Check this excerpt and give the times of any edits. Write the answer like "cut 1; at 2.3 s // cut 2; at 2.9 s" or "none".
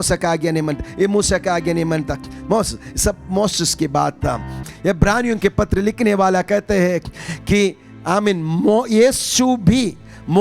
cut 1; at 4.6 s